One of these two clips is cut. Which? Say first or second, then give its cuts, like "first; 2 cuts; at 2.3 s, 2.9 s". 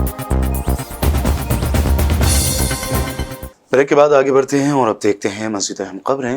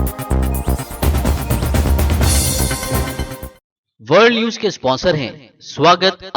second; 1 cut; at 3.5 s